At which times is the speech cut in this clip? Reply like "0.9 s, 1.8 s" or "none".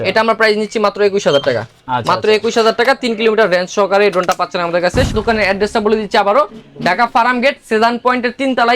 5.1 s